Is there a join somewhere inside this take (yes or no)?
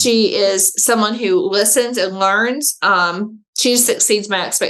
no